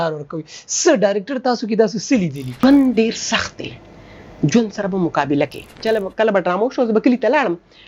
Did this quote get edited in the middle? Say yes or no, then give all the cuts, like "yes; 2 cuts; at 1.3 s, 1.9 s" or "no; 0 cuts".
yes; 2 cuts; at 2.6 s, 5.7 s